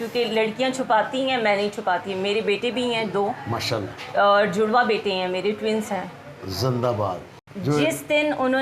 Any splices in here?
yes; 1 cut; at 7.3 s

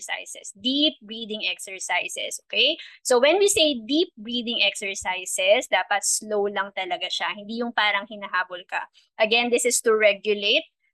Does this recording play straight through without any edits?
yes; 0 cuts

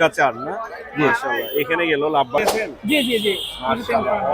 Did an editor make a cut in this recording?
yes; 1 cut; at 2.4 s

